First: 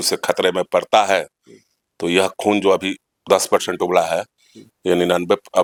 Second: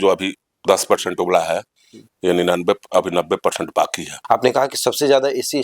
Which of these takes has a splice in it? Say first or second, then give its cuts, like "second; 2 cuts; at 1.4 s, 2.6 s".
second; 1 cut; at 4.1 s